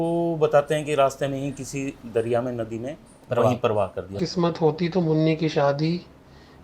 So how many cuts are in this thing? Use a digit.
1